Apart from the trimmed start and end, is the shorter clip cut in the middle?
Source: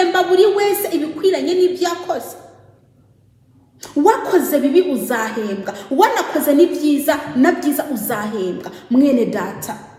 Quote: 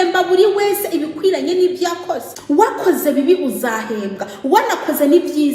yes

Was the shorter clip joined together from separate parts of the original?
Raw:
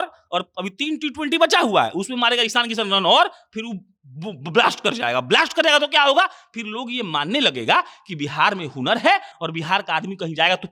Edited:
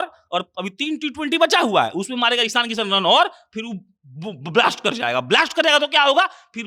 no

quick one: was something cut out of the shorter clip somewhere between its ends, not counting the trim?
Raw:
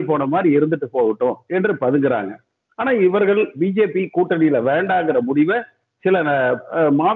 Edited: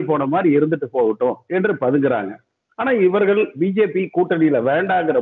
no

